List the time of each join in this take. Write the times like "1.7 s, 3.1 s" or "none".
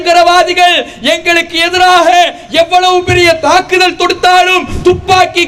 none